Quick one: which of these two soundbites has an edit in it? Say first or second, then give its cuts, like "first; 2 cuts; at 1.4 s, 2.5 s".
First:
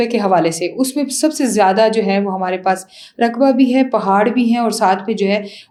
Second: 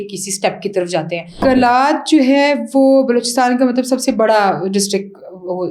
second; 1 cut; at 1.4 s